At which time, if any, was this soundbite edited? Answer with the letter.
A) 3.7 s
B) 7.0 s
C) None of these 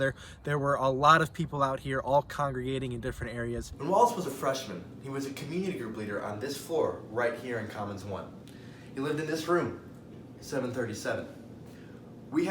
A